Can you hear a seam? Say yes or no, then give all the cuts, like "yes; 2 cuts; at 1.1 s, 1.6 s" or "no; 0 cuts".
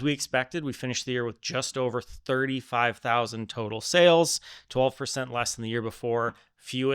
no; 0 cuts